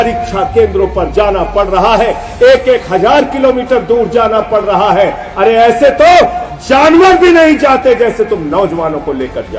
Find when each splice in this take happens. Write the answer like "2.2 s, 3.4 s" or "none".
none